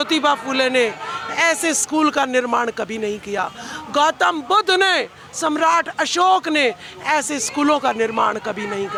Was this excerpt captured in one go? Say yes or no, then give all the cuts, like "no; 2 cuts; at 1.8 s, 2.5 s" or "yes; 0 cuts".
yes; 0 cuts